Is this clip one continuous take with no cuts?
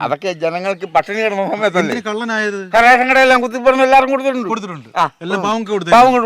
yes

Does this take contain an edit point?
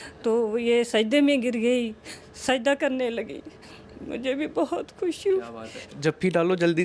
no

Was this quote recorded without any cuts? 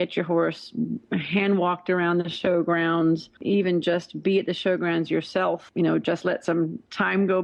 no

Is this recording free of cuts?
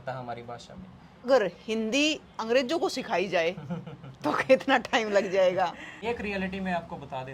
no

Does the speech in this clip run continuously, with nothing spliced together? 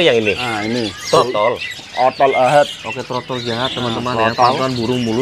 yes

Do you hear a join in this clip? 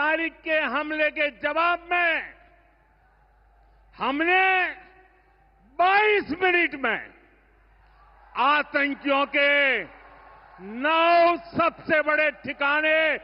no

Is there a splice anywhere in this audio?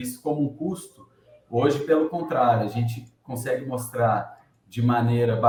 no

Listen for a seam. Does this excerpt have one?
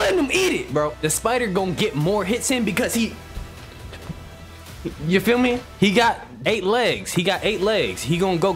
yes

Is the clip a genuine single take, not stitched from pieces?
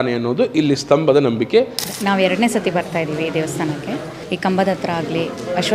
no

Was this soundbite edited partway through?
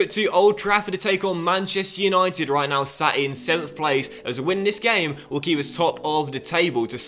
no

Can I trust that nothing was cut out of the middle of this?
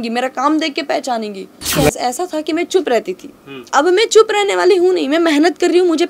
no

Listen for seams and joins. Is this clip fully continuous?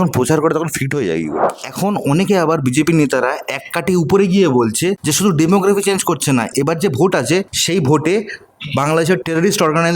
no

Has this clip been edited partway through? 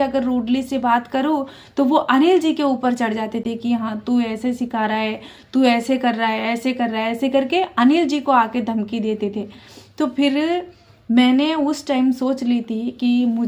no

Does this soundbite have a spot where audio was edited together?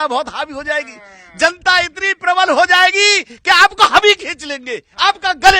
no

